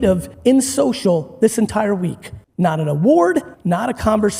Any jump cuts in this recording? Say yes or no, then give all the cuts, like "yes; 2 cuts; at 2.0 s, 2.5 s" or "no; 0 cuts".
no; 0 cuts